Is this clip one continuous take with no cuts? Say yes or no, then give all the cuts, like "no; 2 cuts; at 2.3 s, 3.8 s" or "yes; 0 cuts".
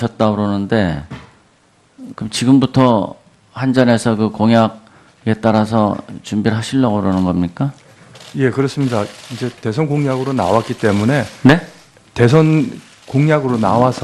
no; 1 cut; at 10.8 s